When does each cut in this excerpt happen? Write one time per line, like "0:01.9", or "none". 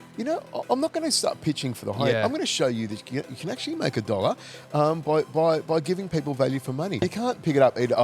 0:07.0